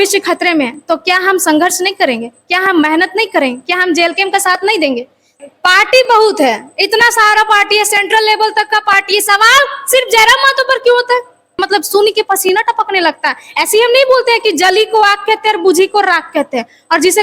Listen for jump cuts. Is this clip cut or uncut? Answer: cut